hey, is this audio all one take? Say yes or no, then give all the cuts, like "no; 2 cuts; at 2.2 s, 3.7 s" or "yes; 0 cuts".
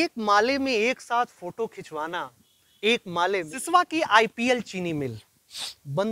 no; 1 cut; at 3.6 s